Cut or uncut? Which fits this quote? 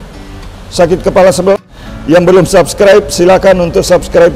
cut